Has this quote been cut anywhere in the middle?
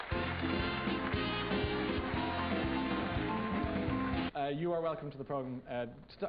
no; 0 cuts

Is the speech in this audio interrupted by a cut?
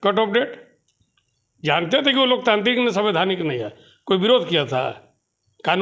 no; 0 cuts

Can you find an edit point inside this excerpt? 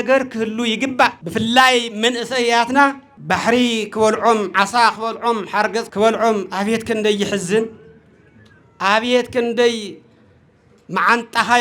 yes; 3 cuts; at 1.2 s, 3.1 s, 5.9 s

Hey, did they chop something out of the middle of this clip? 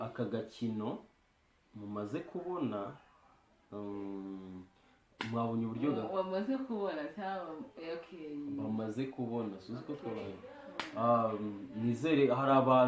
no; 0 cuts

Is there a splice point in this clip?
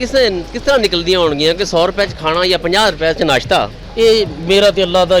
yes; 1 cut; at 3.8 s

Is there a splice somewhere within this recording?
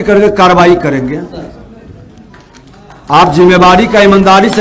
no; 0 cuts

